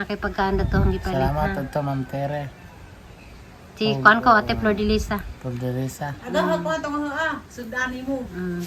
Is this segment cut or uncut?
uncut